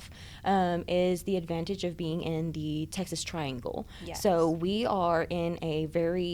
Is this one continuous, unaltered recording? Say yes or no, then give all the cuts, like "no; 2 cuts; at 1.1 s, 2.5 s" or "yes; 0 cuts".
yes; 0 cuts